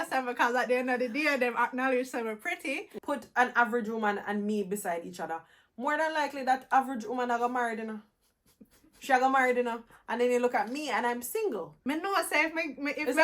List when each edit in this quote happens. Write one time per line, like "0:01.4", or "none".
0:02.9
0:11.7